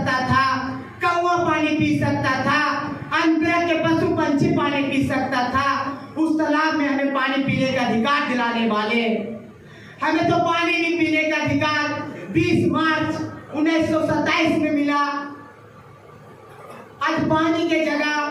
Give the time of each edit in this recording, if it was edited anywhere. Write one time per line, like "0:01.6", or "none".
none

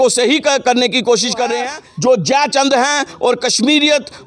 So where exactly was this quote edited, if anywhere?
0:02.0

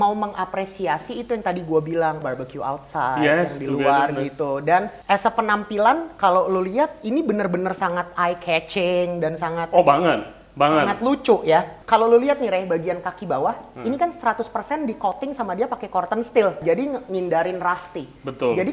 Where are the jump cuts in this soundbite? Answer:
0:02.2
0:04.9
0:11.8
0:16.6

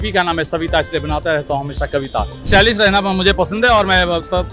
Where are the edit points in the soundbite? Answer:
0:02.5

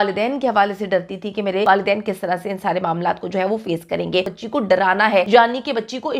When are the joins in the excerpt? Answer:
0:01.7
0:04.4
0:05.3

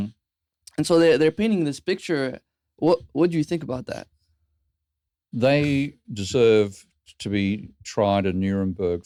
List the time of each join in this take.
none

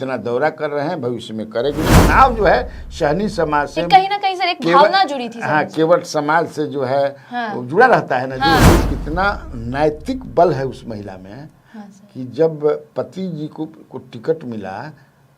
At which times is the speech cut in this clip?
0:01.9
0:08.7

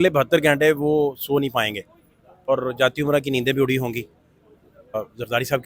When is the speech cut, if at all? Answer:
0:02.5
0:05.0

